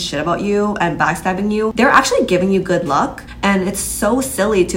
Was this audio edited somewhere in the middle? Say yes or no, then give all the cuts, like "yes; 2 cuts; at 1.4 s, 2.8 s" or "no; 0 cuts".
yes; 2 cuts; at 1.7 s, 3.2 s